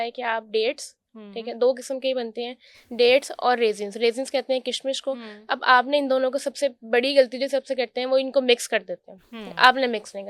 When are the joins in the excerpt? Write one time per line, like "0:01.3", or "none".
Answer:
none